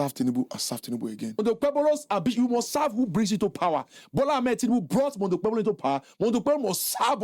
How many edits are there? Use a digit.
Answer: 1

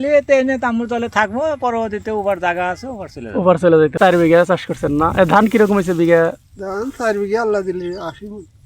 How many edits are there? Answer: 1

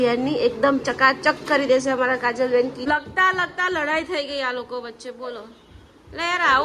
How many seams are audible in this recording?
1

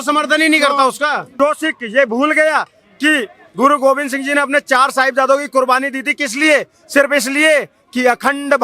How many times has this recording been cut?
1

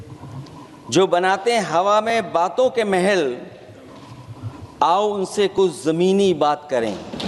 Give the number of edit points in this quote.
0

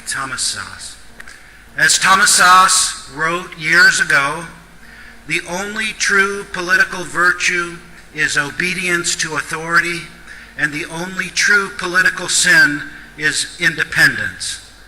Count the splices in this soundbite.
1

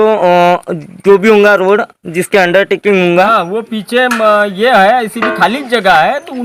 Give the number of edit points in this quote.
0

